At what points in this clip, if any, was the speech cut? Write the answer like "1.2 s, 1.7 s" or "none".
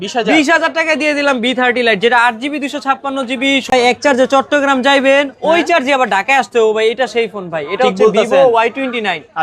3.7 s

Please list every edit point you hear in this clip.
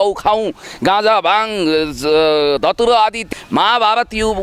3.3 s

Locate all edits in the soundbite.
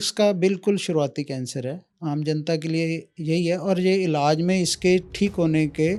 none

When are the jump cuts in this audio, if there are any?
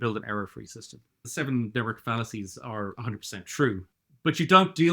1.3 s

